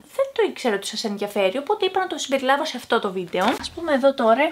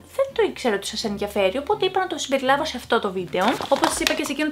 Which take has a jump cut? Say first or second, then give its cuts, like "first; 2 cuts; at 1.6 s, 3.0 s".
first; 1 cut; at 3.6 s